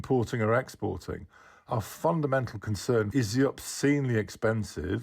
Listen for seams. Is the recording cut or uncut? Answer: cut